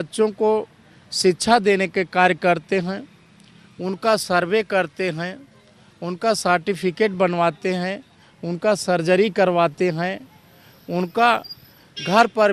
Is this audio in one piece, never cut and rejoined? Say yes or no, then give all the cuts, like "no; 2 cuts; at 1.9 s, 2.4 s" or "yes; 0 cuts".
yes; 0 cuts